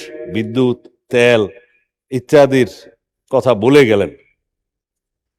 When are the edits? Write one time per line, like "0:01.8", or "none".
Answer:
none